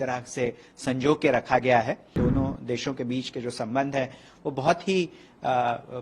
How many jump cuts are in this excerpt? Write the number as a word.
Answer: one